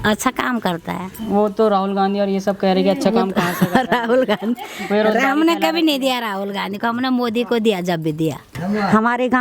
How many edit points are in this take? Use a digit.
2